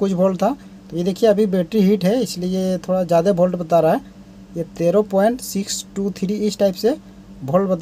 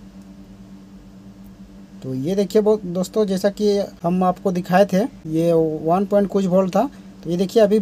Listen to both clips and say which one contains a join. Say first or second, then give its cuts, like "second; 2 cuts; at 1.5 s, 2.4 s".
second; 2 cuts; at 3.9 s, 5.2 s